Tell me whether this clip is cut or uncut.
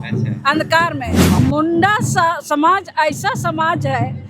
cut